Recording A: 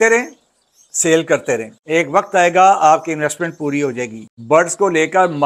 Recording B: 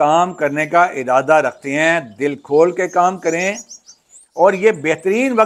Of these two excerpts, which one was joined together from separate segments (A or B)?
A